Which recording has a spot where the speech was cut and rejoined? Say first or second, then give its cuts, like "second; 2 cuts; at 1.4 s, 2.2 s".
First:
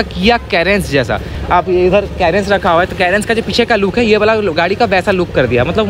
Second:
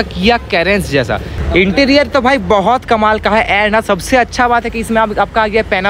second; 1 cut; at 1.3 s